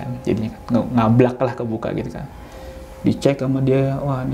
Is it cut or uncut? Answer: uncut